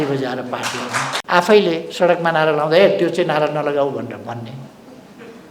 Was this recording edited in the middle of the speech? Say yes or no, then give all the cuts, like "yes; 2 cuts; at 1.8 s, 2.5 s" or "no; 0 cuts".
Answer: yes; 1 cut; at 1.1 s